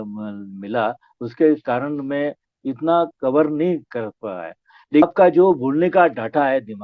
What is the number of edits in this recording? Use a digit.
1